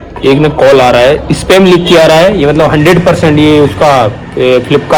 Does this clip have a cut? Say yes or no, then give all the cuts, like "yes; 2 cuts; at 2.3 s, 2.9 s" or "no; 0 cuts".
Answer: no; 0 cuts